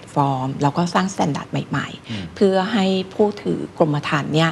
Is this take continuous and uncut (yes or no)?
yes